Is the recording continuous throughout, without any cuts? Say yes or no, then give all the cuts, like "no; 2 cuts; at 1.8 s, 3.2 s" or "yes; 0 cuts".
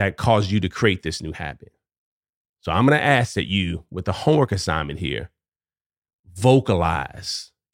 yes; 0 cuts